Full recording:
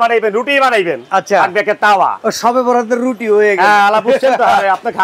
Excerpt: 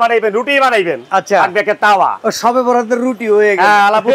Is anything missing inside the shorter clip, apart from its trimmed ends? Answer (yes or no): no